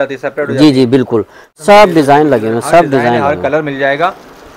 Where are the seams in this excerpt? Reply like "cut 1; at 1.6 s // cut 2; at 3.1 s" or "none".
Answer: cut 1; at 1.4 s